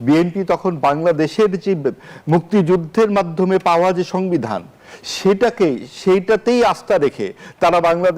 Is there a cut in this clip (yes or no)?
no